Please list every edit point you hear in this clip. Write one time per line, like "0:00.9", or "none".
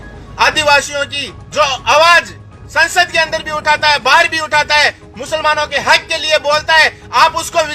none